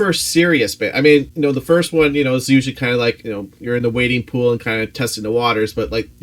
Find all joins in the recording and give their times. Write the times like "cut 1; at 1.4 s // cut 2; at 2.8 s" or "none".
cut 1; at 1.3 s // cut 2; at 3.2 s